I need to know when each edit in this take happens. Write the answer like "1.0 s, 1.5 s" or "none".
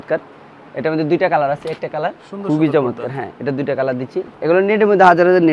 2.3 s, 4.3 s

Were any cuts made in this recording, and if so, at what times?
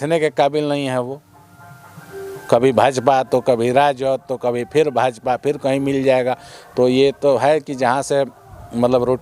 none

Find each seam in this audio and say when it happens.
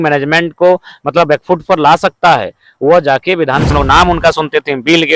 3.7 s

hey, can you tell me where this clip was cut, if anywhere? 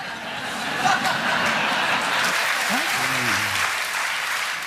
2.3 s

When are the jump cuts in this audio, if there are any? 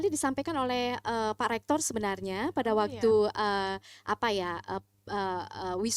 none

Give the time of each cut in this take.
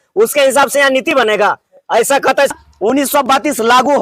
2.6 s

